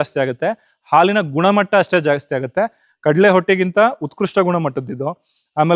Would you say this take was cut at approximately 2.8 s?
yes; 1 cut; at 2.8 s

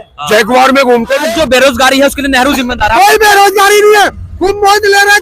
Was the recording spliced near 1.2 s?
yes; 1 cut; at 1.2 s

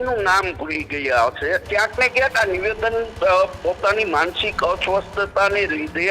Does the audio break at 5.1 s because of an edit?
no; 1 cut; at 1.7 s

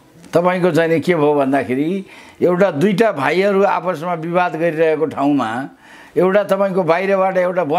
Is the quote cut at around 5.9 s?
no; 0 cuts

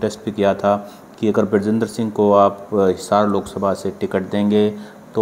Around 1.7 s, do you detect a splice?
no; 0 cuts

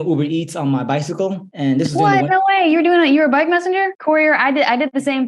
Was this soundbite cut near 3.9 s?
yes; 1 cut; at 3.9 s

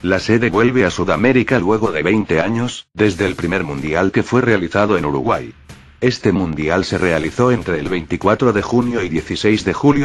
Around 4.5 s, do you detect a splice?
yes; 1 cut; at 4.5 s

